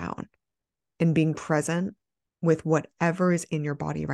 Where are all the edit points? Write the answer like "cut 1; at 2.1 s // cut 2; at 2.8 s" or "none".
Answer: none